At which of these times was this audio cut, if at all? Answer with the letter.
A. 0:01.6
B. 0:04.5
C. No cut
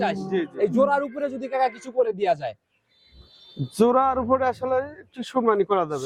C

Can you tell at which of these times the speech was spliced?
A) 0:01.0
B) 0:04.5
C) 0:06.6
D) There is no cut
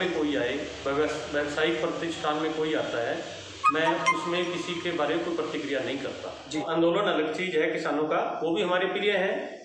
C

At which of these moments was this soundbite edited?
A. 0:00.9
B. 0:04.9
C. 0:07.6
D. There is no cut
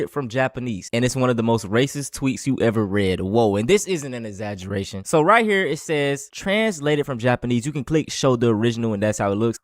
D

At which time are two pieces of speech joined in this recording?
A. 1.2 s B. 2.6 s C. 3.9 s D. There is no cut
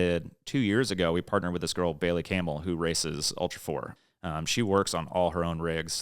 C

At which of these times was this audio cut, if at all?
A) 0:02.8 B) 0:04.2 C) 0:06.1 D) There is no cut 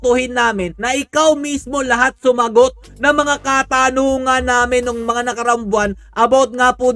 D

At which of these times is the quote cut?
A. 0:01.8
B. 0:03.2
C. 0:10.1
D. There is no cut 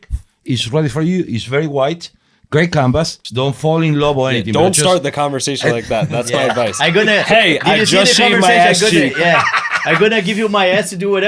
B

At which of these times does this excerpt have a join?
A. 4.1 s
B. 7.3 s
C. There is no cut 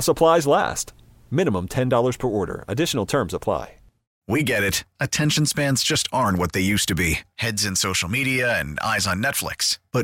A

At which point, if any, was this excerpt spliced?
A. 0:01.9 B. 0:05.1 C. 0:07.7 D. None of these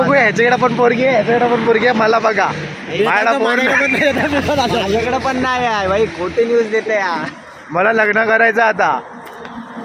D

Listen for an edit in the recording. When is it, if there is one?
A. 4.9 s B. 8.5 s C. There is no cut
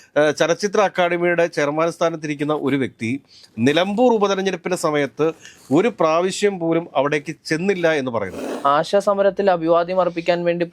B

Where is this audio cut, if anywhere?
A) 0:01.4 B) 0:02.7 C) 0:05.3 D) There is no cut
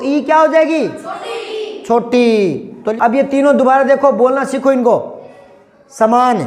B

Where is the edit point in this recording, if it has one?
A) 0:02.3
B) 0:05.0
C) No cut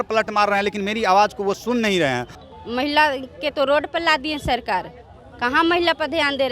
A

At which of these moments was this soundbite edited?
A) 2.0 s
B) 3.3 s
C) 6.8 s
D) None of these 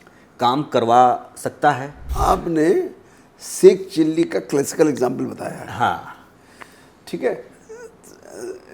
A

